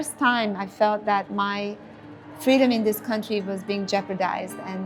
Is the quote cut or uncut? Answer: uncut